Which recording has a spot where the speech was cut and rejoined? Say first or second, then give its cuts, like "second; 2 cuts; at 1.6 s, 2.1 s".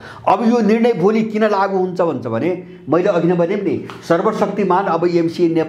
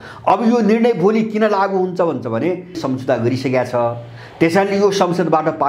second; 1 cut; at 2.8 s